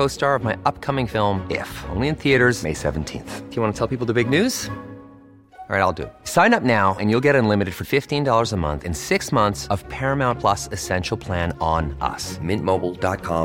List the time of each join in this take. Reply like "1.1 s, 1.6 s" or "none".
none